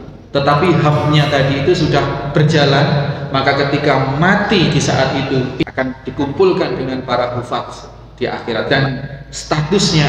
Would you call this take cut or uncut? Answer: cut